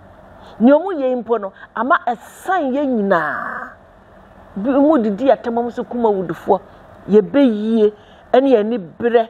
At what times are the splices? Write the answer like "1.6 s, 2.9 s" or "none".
none